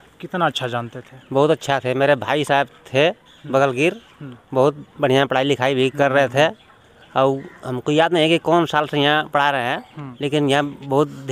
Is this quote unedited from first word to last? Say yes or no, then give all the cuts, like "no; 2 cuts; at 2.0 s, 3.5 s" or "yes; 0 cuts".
yes; 0 cuts